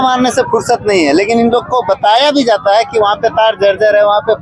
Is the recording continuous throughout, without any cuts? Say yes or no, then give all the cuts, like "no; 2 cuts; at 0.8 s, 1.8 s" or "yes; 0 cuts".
yes; 0 cuts